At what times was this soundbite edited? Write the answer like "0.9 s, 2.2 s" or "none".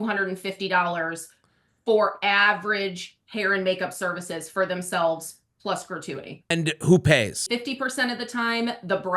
6.5 s, 7.4 s